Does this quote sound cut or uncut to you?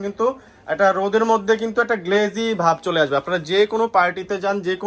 uncut